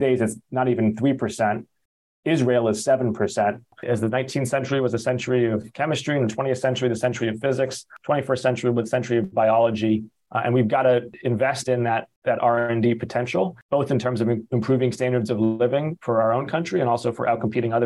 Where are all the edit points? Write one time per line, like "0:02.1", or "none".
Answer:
0:03.7
0:07.9
0:10.2
0:11.1
0:12.1
0:13.6